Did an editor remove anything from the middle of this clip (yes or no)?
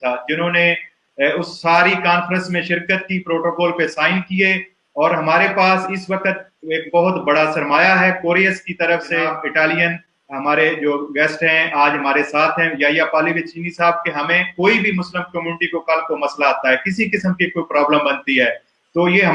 yes